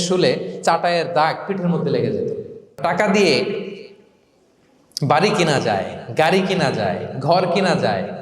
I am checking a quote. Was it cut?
yes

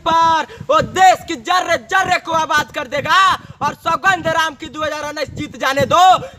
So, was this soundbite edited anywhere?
no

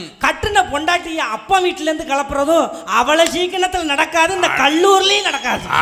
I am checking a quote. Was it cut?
no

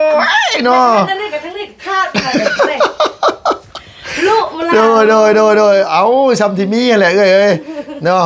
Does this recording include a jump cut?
no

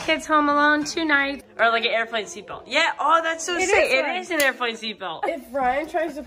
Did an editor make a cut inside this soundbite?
yes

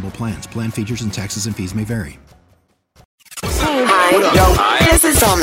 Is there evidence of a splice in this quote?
yes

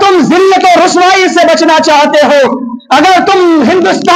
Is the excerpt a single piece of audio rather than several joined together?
yes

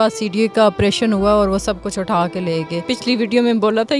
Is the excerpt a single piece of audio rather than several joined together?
no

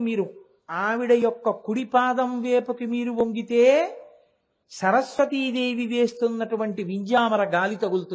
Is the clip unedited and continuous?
yes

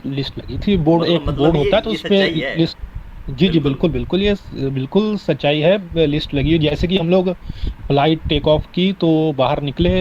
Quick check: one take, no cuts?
yes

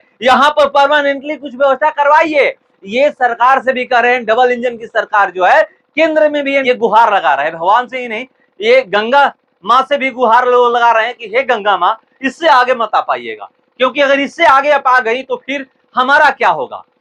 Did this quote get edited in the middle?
yes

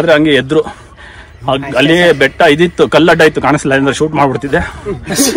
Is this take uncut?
yes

